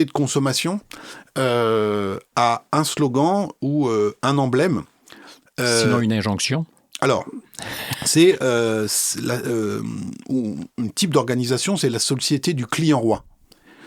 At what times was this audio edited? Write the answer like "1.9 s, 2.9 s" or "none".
none